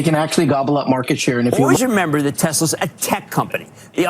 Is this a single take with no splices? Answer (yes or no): no